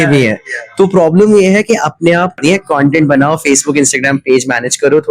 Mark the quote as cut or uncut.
cut